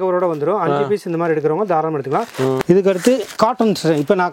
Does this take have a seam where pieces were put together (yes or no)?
yes